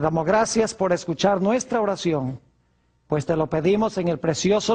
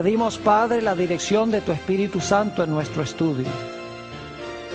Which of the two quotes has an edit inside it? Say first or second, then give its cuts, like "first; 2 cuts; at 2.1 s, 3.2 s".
second; 1 cut; at 1.0 s